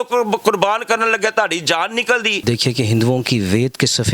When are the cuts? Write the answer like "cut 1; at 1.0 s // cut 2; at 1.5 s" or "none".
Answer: cut 1; at 2.4 s